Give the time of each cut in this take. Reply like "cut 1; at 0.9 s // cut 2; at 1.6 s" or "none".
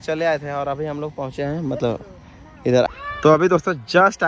cut 1; at 2.9 s